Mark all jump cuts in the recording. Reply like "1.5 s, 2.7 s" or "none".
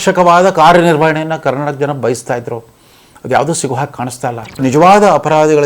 4.6 s